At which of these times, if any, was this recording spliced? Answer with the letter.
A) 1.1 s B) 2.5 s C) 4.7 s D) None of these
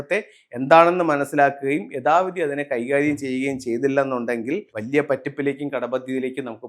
C